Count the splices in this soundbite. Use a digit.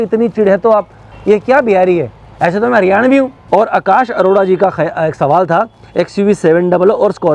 2